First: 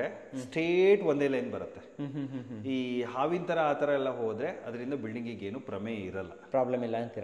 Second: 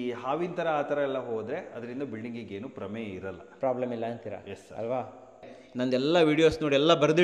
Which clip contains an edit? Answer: second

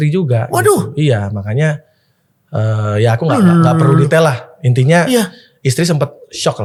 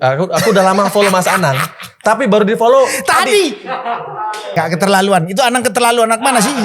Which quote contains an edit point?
second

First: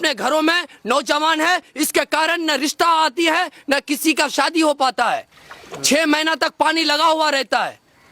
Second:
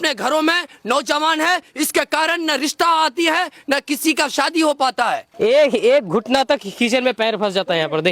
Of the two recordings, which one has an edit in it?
second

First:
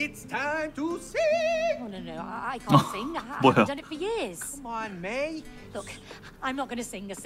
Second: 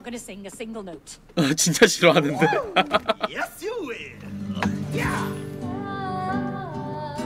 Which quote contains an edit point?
first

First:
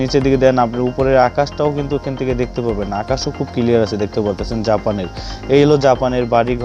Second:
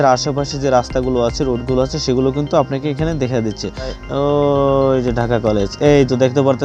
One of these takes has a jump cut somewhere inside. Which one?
second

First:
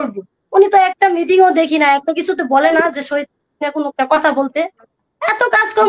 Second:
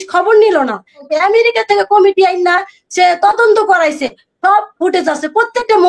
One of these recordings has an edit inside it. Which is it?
second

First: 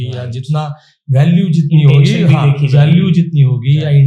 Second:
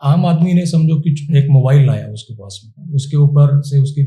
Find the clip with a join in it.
second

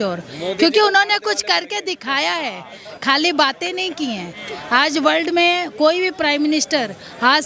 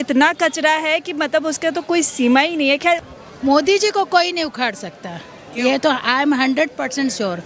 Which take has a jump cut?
second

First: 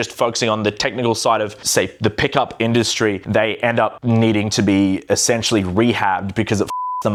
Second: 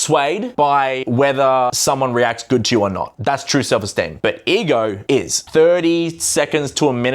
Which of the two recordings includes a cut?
second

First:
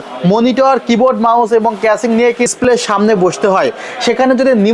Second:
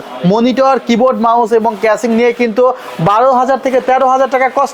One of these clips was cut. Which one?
first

